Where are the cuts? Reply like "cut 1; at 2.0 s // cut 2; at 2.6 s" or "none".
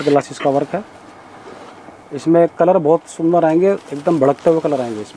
none